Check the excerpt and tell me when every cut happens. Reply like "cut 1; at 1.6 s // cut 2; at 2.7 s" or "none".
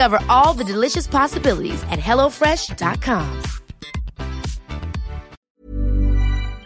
none